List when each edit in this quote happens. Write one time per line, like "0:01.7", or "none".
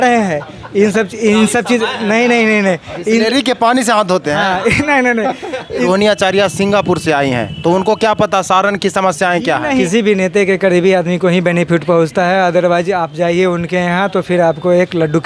0:05.8
0:09.8